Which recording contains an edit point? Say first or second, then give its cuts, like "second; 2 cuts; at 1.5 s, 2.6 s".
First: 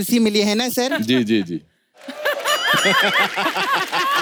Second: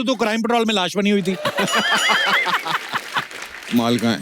second; 1 cut; at 3.3 s